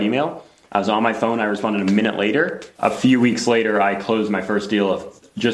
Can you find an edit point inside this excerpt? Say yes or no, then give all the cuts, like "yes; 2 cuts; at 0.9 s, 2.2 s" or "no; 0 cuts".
yes; 1 cut; at 2.6 s